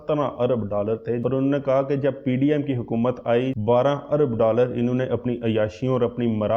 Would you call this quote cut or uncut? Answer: cut